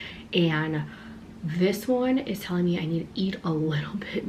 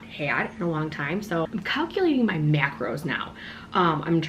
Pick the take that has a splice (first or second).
second